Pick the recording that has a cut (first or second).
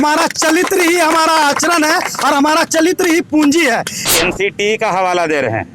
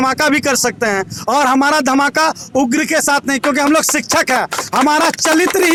first